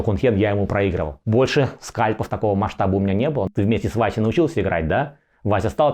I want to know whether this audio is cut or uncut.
cut